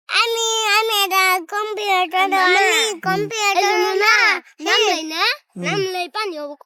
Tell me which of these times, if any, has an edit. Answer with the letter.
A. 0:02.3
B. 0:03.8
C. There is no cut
C